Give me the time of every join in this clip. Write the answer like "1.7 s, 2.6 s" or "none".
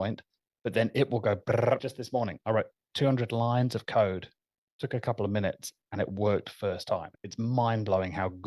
1.9 s, 7.2 s

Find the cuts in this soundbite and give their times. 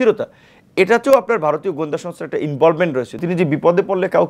3.2 s

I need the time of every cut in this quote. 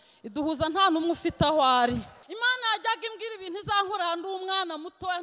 2.2 s

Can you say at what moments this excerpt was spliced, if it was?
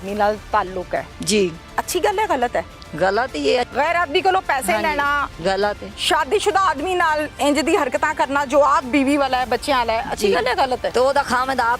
1.6 s, 3.7 s, 5.4 s, 10.9 s

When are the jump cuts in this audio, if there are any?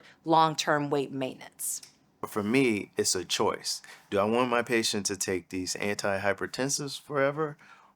2.3 s

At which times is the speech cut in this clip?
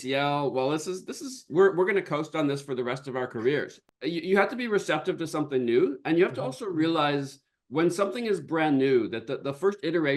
3.8 s

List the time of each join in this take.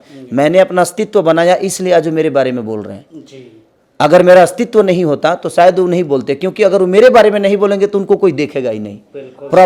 none

